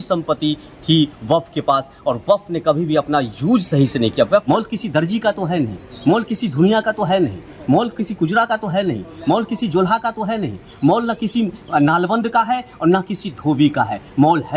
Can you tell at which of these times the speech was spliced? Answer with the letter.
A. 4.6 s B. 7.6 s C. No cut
A